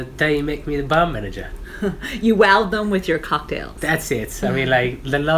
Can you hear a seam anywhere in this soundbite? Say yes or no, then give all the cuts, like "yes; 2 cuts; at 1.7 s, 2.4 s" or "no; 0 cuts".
no; 0 cuts